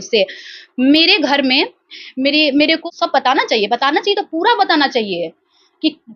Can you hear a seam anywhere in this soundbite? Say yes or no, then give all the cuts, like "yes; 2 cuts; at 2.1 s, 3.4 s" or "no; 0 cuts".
yes; 1 cut; at 2.8 s